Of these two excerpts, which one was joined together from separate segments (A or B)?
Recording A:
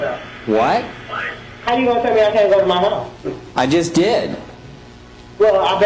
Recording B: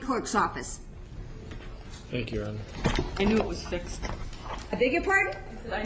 B